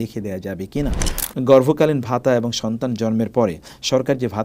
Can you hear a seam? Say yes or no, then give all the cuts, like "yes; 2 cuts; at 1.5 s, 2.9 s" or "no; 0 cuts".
yes; 1 cut; at 1.1 s